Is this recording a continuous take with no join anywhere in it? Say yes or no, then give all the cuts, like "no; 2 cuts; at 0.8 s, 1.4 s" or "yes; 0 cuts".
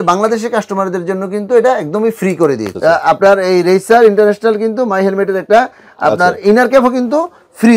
no; 1 cut; at 2.7 s